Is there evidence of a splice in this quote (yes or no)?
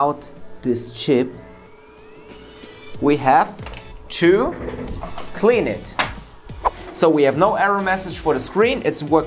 yes